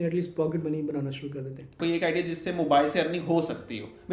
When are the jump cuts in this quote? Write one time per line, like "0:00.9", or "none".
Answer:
0:01.8

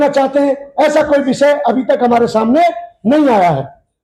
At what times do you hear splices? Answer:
none

